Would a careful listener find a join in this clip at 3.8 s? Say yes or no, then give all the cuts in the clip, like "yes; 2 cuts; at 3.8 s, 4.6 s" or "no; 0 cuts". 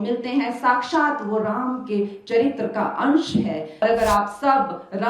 yes; 1 cut; at 3.8 s